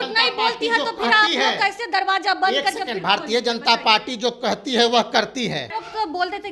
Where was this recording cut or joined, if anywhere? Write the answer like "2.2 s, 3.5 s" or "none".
none